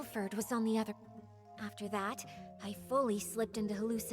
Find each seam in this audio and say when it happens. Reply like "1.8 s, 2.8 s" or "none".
1.0 s